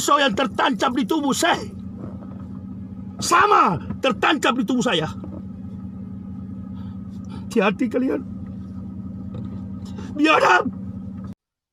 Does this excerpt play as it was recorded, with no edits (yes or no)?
yes